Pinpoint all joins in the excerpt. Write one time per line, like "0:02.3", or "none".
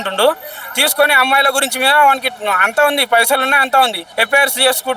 0:04.0